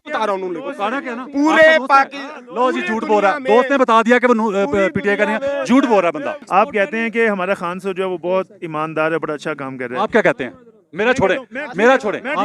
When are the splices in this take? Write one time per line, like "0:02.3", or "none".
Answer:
0:06.4